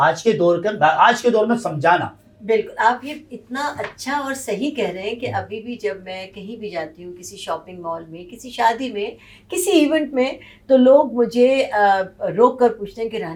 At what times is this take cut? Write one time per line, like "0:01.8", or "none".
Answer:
none